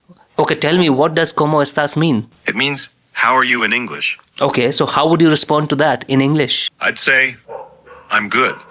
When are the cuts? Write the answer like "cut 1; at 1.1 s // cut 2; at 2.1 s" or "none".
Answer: cut 1; at 2.4 s // cut 2; at 6.7 s